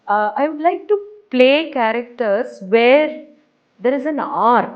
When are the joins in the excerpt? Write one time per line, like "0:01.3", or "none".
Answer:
none

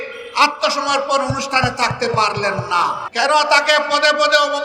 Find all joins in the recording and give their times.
0:03.0

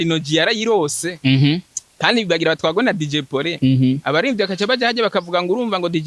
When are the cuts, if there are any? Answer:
none

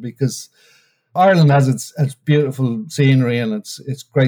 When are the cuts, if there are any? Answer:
0:01.1
0:02.2

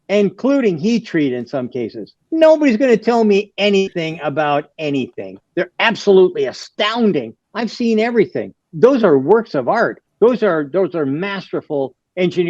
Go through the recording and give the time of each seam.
0:05.4
0:08.6

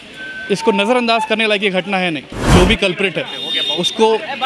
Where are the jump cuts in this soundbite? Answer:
0:02.5

